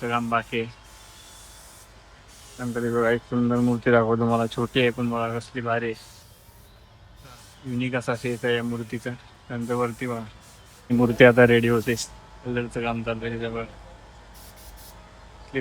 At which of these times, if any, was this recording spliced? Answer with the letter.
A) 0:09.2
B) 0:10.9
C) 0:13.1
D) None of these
B